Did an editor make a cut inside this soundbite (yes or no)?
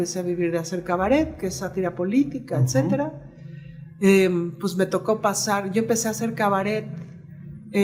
no